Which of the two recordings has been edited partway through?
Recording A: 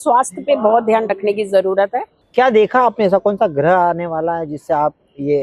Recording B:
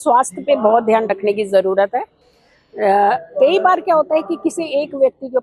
A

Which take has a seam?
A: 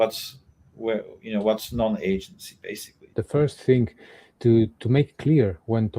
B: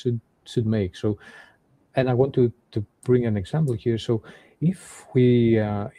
A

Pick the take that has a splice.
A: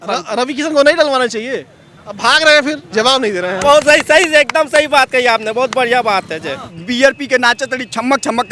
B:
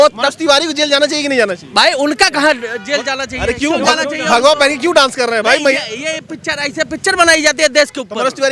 A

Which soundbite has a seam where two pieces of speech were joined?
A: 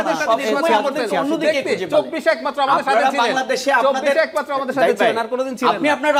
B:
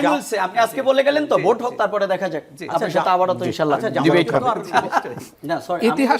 B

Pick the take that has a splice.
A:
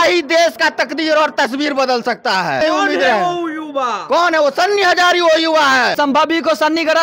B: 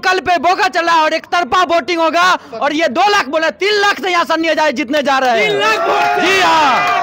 A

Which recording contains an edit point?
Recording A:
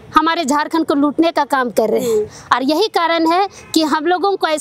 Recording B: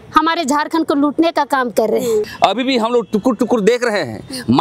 B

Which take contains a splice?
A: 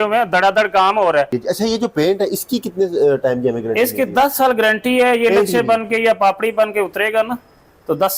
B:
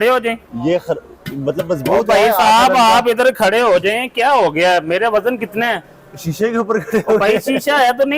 A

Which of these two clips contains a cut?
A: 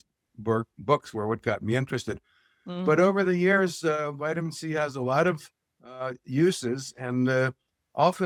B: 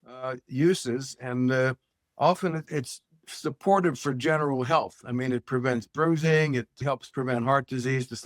B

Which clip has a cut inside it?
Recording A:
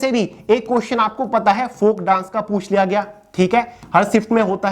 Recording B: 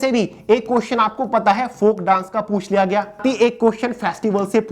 B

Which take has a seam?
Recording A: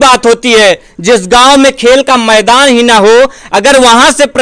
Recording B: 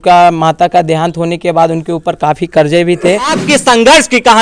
B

